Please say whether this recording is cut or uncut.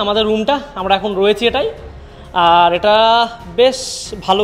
uncut